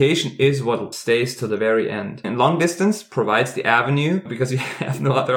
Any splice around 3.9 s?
no; 2 cuts; at 0.9 s, 2.2 s

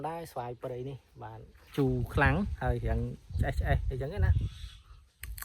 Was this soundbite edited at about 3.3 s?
no; 1 cut; at 1.7 s

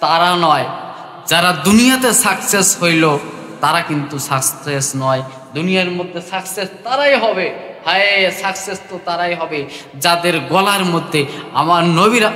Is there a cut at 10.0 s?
no; 0 cuts

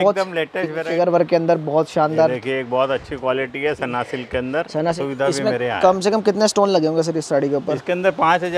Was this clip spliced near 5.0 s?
yes; 2 cuts; at 0.9 s, 5.0 s

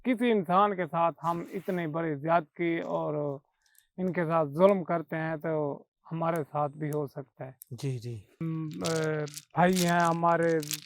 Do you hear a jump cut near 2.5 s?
no; 1 cut; at 8.3 s

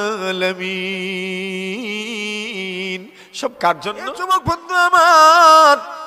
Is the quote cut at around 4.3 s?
yes; 1 cut; at 4.3 s

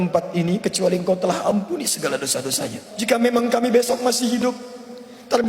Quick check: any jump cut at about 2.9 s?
yes; 1 cut; at 2.9 s

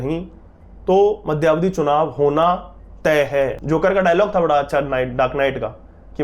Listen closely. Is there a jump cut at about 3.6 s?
yes; 1 cut; at 3.6 s

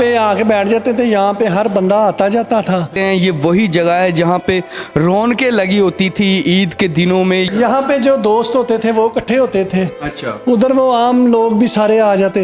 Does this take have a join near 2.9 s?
yes; 2 cuts; at 2.9 s, 7.5 s

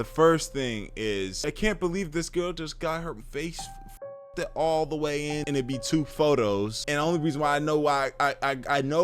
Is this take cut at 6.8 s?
yes; 4 cuts; at 1.4 s, 3.2 s, 5.4 s, 6.8 s

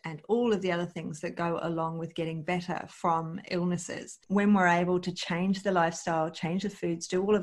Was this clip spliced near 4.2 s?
yes; 1 cut; at 4.2 s

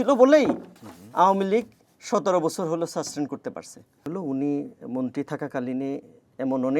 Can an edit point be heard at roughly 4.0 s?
yes; 1 cut; at 4.0 s

